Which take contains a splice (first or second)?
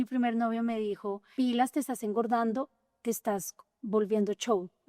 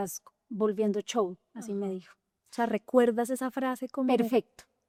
first